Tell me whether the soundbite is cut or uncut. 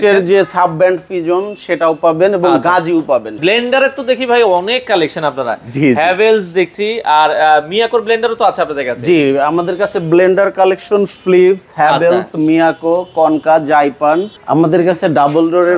cut